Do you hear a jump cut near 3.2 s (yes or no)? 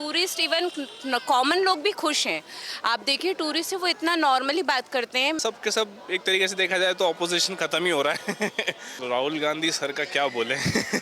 no